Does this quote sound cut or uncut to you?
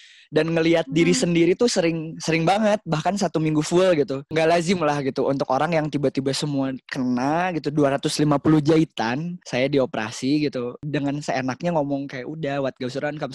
cut